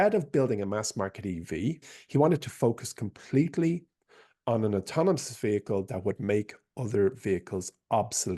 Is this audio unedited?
no; 1 cut; at 1.9 s

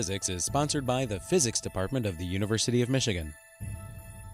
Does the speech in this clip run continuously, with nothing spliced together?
no; 1 cut; at 3.5 s

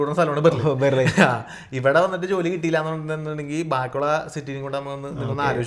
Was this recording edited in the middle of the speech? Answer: no; 0 cuts

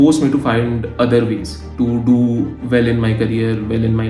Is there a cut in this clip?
no; 0 cuts

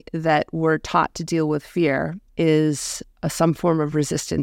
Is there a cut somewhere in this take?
yes; 1 cut; at 2.2 s

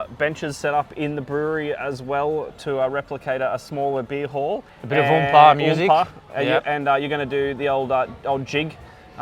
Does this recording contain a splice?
yes; 1 cut; at 4.7 s

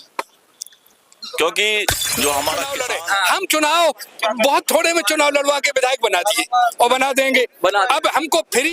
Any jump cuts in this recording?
yes; 1 cut; at 2.8 s

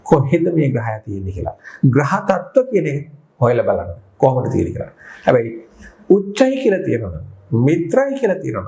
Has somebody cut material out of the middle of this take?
no; 0 cuts

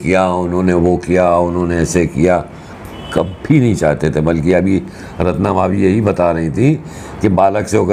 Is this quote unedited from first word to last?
yes; 0 cuts

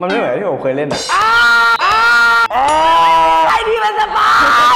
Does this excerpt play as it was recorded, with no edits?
yes; 0 cuts

